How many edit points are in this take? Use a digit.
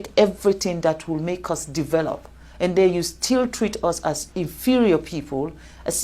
0